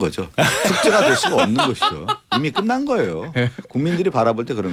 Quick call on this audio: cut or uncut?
uncut